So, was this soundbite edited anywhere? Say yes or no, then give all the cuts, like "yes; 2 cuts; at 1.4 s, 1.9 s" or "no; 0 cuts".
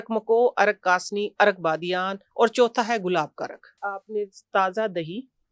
yes; 1 cut; at 3.8 s